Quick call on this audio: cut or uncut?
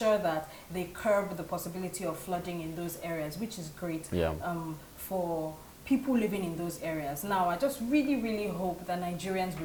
uncut